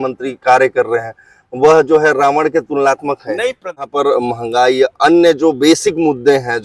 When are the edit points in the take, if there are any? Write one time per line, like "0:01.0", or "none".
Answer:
0:03.6